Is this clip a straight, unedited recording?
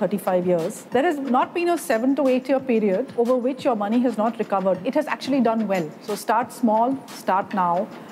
no; 4 cuts; at 1.3 s, 3.1 s, 4.8 s, 6.1 s

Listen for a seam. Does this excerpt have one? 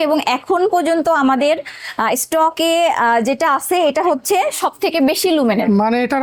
no; 0 cuts

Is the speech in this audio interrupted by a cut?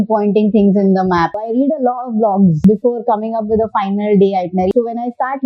yes; 3 cuts; at 1.3 s, 2.6 s, 4.7 s

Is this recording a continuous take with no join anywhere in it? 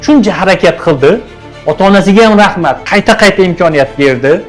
yes; 0 cuts

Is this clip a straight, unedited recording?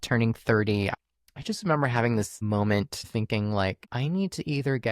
no; 3 cuts; at 0.9 s, 3.1 s, 3.9 s

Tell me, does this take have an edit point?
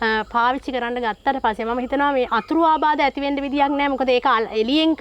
no; 0 cuts

